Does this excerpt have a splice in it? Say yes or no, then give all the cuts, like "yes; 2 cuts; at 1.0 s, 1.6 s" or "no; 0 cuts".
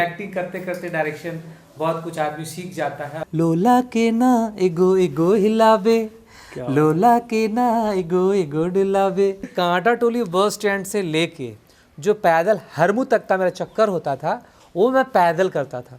yes; 2 cuts; at 3.2 s, 9.5 s